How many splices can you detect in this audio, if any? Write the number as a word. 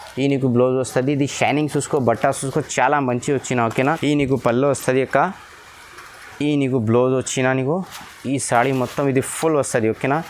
one